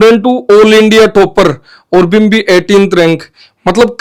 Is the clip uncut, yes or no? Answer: yes